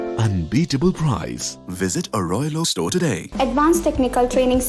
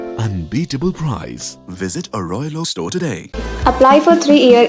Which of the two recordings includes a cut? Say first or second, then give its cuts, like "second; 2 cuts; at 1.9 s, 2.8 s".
first; 1 cut; at 3.2 s